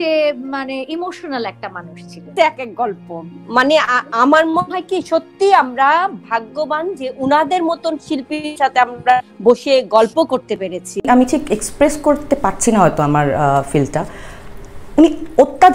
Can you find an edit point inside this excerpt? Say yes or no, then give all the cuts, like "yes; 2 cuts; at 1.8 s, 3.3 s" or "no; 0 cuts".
yes; 2 cuts; at 2.2 s, 11.0 s